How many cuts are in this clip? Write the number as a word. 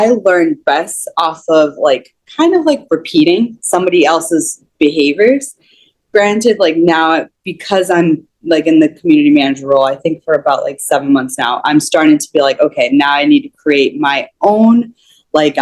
zero